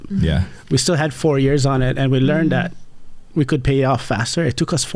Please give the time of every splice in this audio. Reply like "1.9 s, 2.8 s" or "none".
none